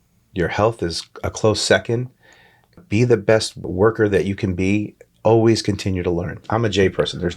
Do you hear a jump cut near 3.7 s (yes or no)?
yes